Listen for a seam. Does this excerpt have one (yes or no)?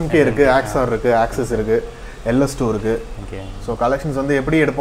no